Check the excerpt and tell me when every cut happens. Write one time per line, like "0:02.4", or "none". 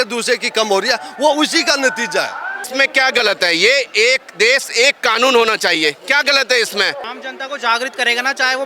0:02.6
0:07.0